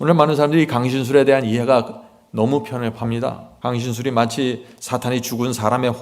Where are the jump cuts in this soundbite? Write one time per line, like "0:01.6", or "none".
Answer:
0:03.5